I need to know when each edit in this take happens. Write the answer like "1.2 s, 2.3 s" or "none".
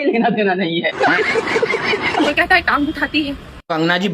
2.3 s